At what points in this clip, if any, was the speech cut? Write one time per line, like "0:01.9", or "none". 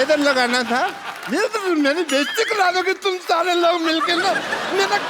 none